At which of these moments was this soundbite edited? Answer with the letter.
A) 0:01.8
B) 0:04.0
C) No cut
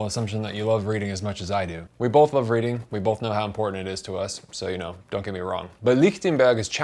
A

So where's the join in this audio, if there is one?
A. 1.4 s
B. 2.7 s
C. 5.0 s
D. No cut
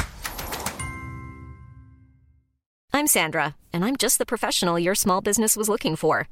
B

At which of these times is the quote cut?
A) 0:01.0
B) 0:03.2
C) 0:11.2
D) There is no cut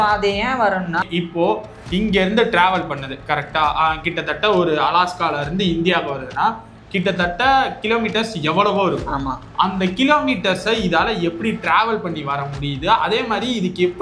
A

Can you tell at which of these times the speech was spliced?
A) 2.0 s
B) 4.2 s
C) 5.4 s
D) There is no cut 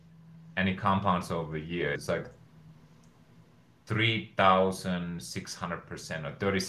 A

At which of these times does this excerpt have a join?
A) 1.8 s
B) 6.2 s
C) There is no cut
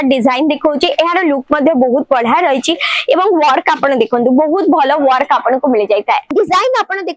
B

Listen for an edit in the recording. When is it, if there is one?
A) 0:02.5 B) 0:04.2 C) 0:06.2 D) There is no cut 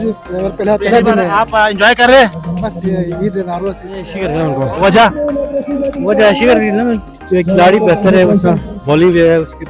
B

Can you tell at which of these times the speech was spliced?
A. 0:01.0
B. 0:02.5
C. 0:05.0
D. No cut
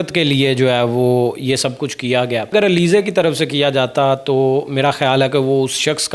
B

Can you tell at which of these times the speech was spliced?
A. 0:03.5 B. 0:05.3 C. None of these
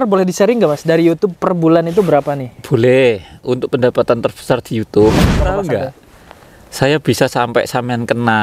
B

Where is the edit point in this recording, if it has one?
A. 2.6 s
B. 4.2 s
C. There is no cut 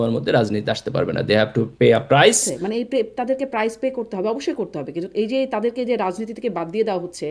A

